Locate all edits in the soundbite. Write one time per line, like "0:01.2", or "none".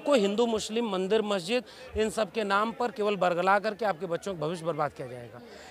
none